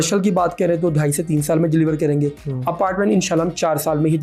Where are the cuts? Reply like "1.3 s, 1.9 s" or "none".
none